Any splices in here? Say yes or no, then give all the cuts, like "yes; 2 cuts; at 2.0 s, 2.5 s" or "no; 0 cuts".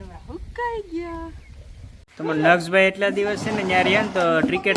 no; 0 cuts